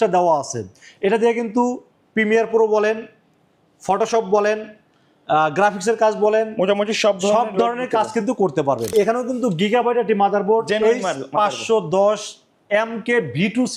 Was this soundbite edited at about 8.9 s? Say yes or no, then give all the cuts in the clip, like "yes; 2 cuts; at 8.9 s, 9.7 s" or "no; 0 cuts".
yes; 1 cut; at 8.9 s